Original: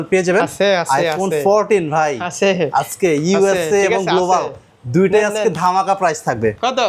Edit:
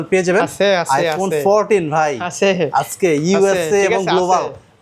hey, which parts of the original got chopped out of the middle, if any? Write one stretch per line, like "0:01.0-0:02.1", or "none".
none